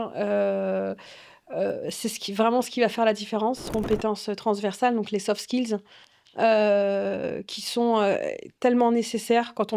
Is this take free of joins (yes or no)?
no